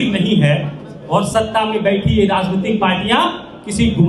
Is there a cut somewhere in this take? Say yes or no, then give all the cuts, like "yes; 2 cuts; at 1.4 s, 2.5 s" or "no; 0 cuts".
no; 0 cuts